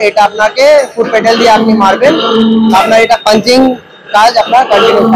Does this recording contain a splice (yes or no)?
no